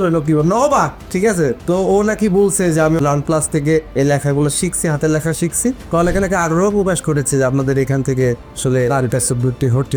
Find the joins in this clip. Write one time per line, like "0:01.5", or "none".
none